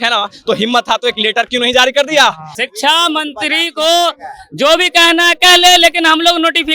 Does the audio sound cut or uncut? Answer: cut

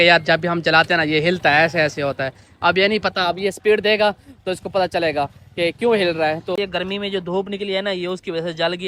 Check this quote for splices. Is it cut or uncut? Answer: cut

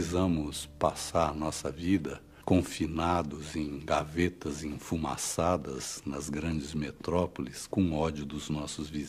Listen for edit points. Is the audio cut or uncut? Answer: cut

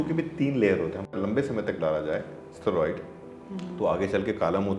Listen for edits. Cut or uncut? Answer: cut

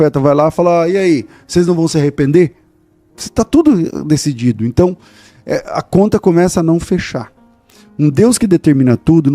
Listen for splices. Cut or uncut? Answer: uncut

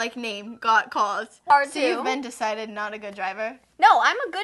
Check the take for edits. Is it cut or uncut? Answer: cut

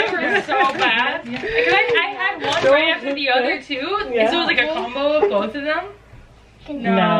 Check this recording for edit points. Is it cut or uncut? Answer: uncut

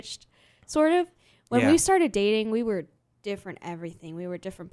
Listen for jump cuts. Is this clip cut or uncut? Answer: uncut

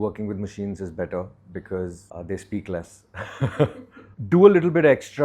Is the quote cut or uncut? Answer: cut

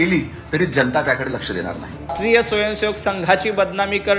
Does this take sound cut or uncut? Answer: cut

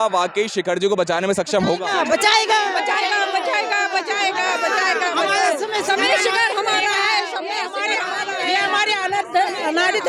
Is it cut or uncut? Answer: uncut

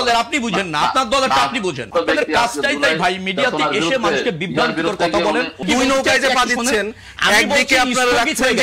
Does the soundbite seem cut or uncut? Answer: cut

